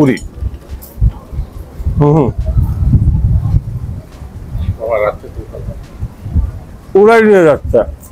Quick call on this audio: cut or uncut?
uncut